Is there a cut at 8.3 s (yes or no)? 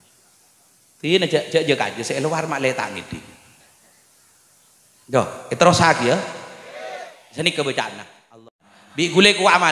yes